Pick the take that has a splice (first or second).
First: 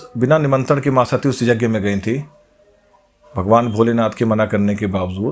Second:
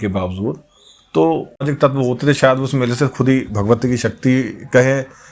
second